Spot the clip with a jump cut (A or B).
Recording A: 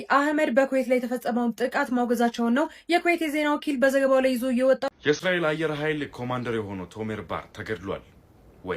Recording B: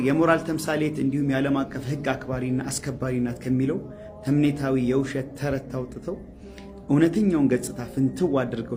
A